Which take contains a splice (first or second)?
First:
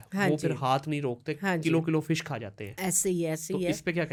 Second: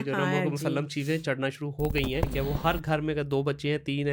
second